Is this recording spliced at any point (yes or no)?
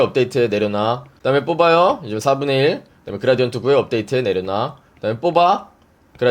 yes